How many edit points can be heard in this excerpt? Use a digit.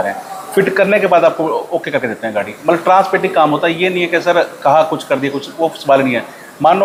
0